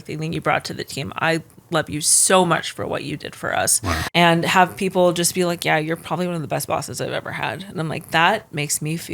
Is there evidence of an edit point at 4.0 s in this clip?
yes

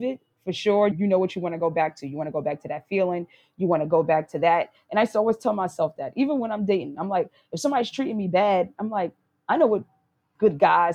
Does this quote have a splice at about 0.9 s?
yes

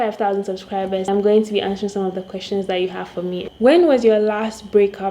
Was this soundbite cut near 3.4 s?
yes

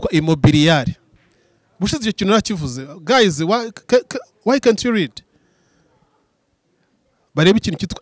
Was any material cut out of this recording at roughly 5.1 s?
no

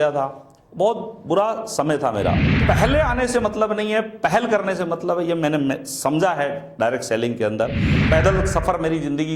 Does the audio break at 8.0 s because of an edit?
yes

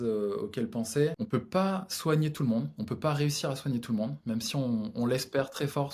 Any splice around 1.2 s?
yes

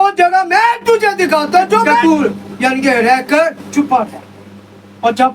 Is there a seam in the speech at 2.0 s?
yes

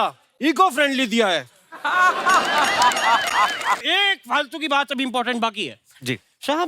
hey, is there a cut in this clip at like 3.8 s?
yes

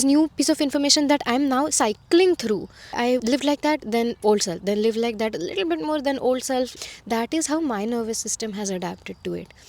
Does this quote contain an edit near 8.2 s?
no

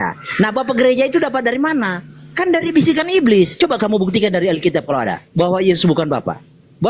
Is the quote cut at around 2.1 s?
no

